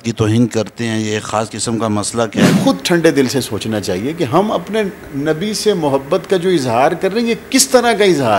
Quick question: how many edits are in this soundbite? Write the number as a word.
one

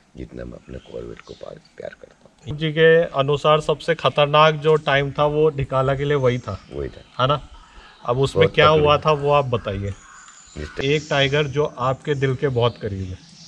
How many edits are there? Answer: two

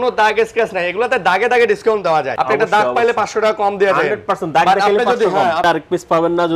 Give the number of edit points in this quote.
two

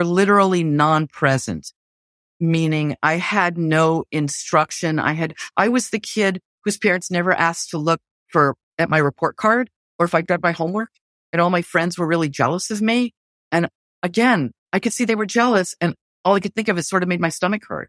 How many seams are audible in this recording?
zero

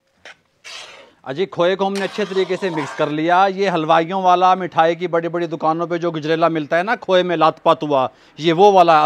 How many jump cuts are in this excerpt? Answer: zero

